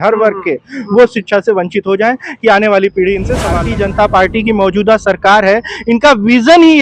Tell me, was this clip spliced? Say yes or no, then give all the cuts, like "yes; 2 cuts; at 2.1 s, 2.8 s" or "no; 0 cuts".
yes; 1 cut; at 3.5 s